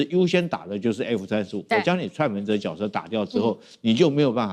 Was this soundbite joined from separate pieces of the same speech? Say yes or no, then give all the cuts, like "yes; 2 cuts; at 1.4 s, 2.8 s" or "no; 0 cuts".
no; 0 cuts